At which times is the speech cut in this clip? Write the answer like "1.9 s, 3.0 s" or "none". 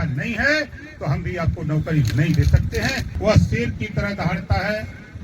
3.1 s